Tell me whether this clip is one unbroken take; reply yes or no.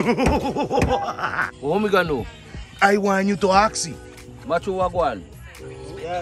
no